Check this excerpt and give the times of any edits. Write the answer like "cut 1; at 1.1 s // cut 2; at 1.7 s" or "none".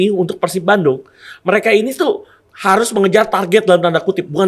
none